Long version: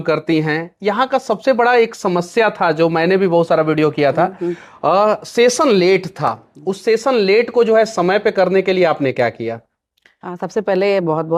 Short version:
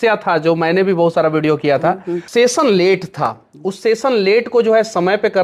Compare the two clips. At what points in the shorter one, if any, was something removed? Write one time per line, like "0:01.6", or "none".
0:02.2